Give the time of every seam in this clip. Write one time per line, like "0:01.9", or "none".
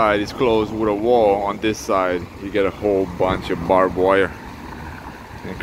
none